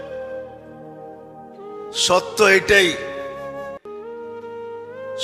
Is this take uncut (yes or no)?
no